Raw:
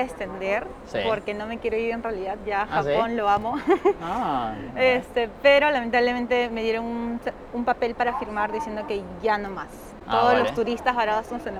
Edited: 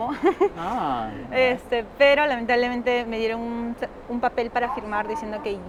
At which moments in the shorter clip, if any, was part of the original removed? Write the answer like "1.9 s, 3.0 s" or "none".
none